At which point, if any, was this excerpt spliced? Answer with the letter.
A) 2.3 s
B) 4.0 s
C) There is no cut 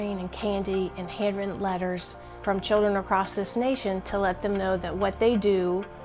A